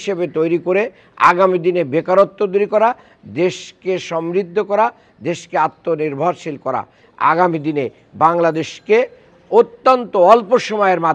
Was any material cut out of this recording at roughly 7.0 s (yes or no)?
yes